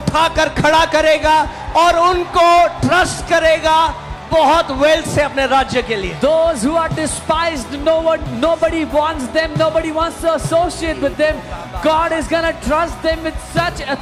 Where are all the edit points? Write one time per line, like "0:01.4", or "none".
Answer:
none